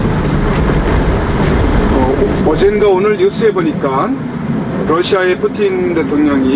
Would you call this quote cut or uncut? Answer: uncut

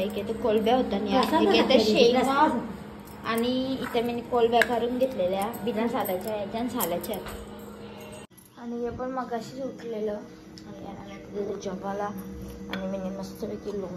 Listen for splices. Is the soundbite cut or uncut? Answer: cut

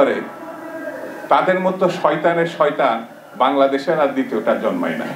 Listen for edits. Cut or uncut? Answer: uncut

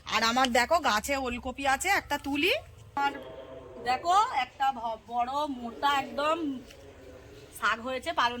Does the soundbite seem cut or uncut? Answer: cut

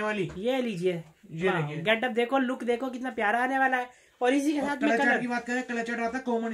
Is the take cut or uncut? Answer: uncut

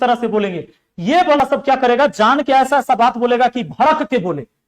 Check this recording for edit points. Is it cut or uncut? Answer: cut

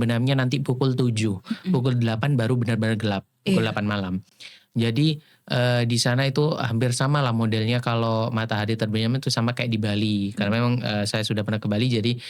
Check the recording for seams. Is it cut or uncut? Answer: uncut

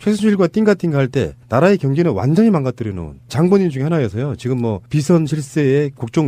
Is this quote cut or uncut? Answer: cut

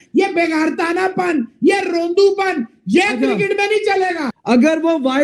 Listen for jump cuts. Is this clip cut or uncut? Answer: cut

